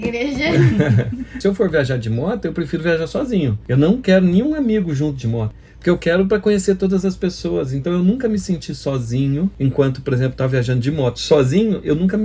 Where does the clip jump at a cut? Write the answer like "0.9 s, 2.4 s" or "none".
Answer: 1.4 s